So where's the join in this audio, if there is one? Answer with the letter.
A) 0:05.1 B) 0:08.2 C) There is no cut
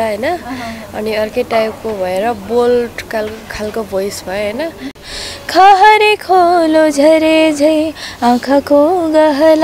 A